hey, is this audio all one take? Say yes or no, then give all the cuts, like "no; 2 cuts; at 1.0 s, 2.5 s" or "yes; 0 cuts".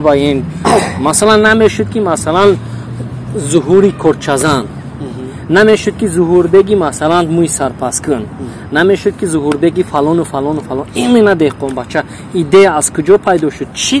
yes; 0 cuts